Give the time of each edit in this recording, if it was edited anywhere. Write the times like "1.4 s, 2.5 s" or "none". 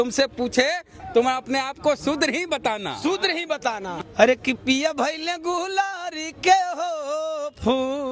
4.0 s